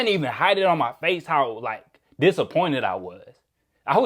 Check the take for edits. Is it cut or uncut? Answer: uncut